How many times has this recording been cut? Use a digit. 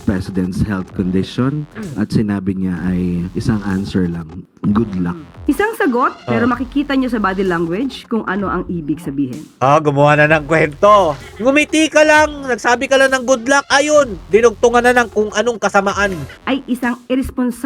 3